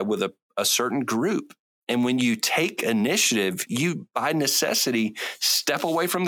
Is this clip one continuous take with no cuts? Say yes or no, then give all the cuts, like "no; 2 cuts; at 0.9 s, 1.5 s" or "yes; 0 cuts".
no; 1 cut; at 3.7 s